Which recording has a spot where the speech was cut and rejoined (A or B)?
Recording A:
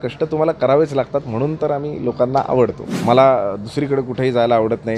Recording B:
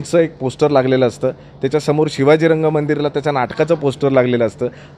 A